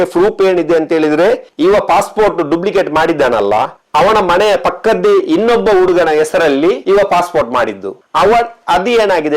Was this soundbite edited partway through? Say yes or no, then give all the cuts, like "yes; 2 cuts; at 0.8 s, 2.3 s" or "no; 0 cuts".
yes; 1 cut; at 1.5 s